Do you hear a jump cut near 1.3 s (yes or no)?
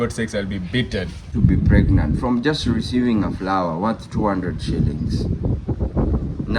yes